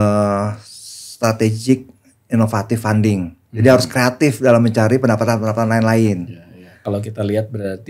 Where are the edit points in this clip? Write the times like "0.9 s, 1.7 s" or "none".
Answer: 6.7 s